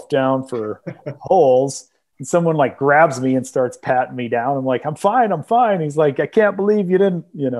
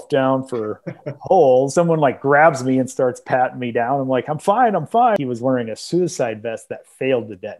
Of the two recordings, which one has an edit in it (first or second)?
second